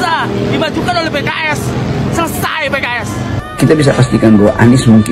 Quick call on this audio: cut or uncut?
cut